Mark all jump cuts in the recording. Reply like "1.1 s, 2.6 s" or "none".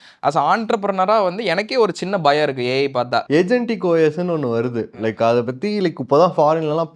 3.2 s